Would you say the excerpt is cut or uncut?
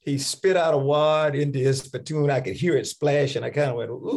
uncut